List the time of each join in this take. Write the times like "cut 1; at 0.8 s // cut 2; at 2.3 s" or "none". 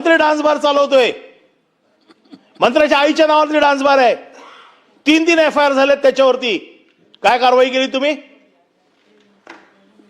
none